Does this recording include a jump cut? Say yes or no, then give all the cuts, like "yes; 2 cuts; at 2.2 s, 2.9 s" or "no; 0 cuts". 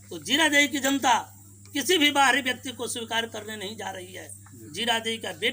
no; 0 cuts